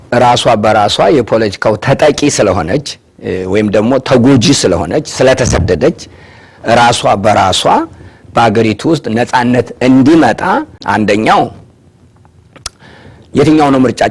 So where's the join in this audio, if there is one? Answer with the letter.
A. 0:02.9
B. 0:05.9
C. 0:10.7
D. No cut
C